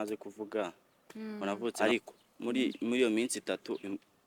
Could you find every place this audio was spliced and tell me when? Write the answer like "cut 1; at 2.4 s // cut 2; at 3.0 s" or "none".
cut 1; at 1.7 s